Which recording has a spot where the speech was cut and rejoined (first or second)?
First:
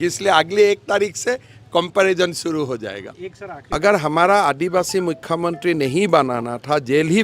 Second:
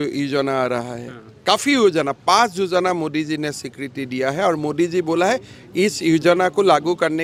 first